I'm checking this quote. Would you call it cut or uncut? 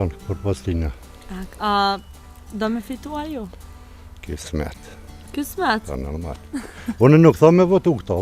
uncut